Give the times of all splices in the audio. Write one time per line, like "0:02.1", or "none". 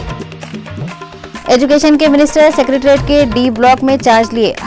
0:01.4